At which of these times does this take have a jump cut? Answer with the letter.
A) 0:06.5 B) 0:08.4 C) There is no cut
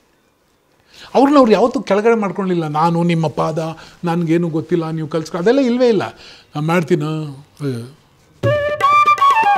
B